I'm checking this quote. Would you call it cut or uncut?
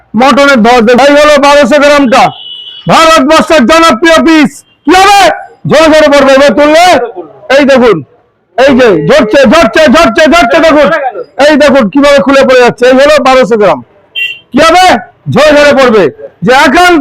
cut